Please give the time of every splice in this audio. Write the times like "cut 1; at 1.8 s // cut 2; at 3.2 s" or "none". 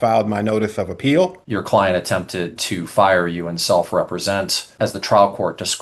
cut 1; at 1.4 s // cut 2; at 4.7 s